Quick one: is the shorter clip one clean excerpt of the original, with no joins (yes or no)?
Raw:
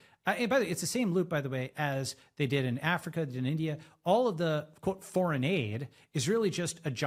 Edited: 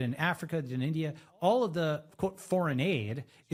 yes